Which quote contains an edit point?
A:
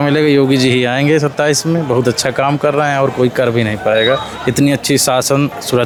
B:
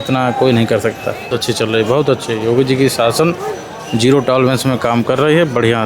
B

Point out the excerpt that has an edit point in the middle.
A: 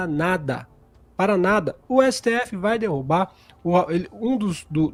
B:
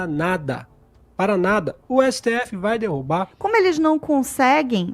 B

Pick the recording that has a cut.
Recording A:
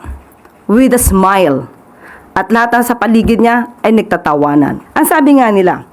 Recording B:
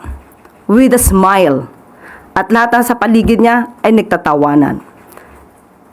A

